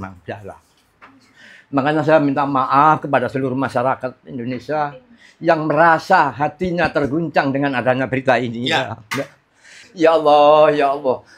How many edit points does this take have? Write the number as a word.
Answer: one